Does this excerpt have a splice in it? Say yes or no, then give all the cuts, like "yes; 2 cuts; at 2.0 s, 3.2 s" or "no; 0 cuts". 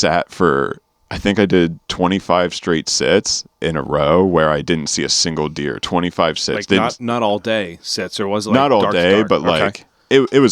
yes; 1 cut; at 3.4 s